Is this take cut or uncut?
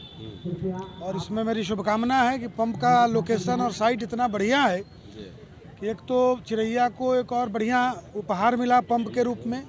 uncut